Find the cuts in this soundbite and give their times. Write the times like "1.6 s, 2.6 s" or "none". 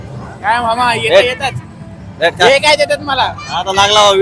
none